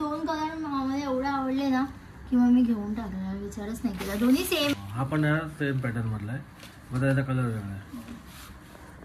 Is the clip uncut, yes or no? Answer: no